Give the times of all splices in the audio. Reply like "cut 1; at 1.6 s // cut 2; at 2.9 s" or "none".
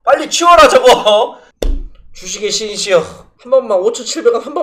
cut 1; at 1.4 s // cut 2; at 3.3 s